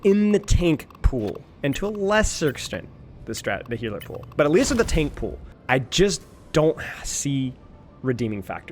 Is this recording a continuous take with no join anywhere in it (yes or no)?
yes